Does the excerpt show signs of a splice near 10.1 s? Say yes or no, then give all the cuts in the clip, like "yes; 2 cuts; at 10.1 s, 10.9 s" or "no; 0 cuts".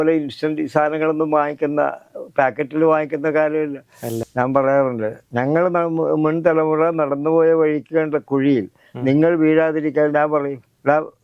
no; 1 cut; at 4.1 s